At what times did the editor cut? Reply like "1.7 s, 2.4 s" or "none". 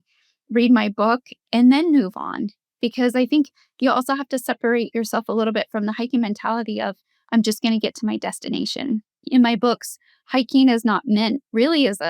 9.1 s